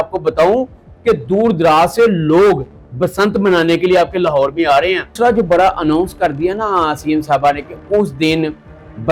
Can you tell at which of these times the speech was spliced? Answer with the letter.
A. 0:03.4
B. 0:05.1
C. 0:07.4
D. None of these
B